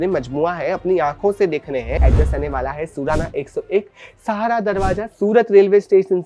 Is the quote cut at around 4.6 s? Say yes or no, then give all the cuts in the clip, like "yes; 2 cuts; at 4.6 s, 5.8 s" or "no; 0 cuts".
no; 1 cut; at 2.0 s